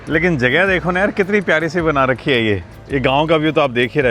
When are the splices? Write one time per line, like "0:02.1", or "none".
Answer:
0:02.7

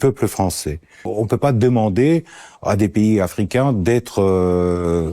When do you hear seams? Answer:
0:01.1

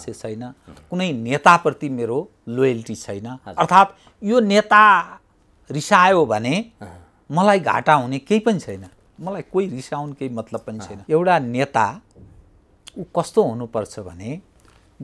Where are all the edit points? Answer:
0:10.9

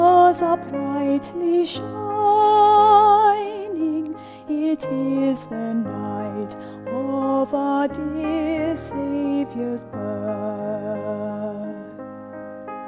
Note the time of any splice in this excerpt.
0:11.7

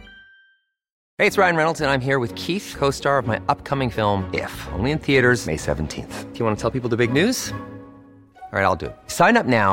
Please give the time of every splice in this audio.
0:01.0

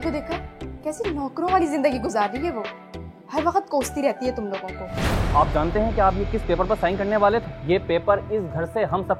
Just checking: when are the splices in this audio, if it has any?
0:05.1
0:07.5

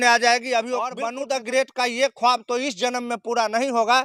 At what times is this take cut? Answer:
0:01.0

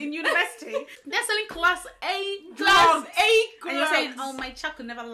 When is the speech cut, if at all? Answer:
0:00.9

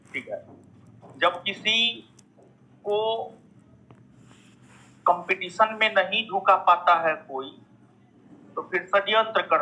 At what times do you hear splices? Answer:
none

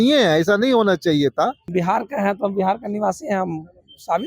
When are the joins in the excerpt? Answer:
0:01.7

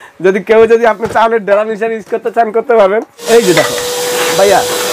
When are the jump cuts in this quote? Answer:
0:03.2

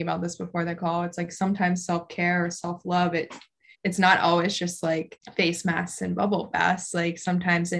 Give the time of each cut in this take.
0:03.7
0:05.2

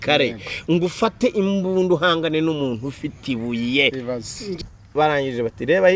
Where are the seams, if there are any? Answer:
0:04.6

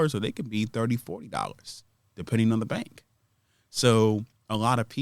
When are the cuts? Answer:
none

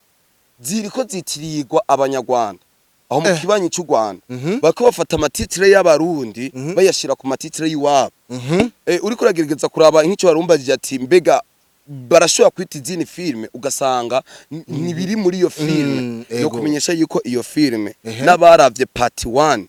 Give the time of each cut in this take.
none

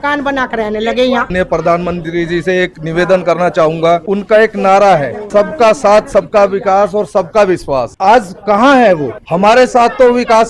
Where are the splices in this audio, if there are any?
0:01.3
0:04.0
0:05.2
0:07.9
0:09.2

